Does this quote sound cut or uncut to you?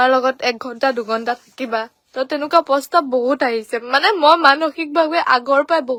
uncut